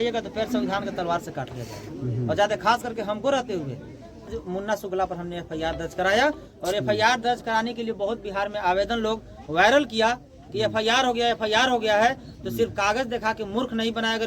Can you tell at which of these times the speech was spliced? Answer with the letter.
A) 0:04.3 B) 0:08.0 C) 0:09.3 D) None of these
A